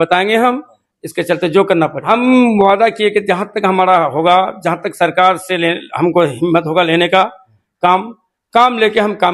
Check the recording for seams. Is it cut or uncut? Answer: cut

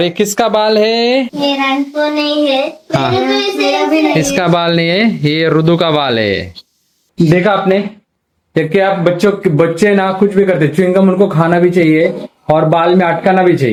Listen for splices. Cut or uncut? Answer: uncut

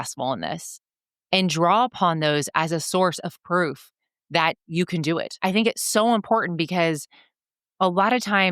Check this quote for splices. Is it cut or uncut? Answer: cut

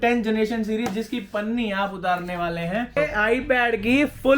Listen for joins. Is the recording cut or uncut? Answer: cut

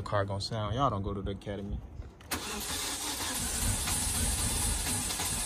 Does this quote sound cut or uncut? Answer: uncut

